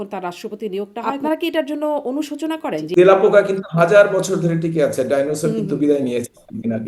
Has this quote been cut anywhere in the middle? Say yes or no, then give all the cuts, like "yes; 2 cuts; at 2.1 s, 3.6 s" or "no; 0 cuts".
yes; 2 cuts; at 1.1 s, 2.9 s